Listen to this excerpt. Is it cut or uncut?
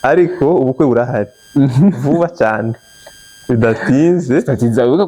uncut